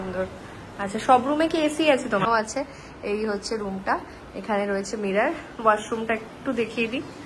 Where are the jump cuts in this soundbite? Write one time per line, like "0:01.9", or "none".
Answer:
0:02.3